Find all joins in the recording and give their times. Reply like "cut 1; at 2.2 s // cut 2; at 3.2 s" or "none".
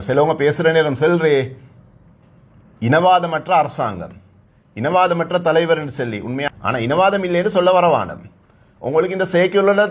cut 1; at 6.4 s